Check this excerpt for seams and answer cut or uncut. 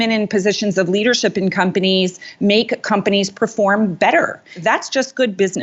uncut